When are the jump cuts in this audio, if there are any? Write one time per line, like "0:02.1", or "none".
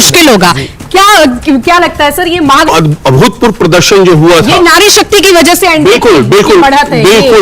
0:02.7